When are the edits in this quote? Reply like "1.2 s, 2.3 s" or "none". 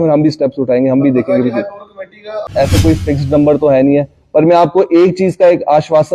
2.5 s